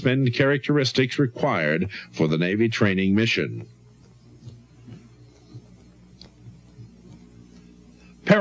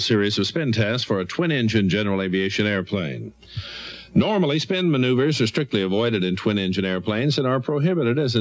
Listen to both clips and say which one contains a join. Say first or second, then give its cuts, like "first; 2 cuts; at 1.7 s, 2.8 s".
first; 1 cut; at 3.1 s